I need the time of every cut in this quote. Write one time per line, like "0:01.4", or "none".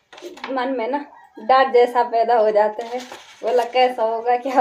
none